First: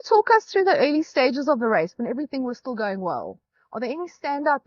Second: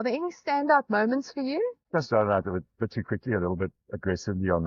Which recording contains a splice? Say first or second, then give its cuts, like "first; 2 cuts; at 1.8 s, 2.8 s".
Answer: second; 1 cut; at 1.8 s